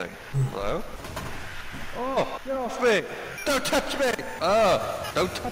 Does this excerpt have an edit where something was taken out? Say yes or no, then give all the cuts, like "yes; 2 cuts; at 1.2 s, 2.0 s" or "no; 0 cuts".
yes; 2 cuts; at 1.1 s, 2.4 s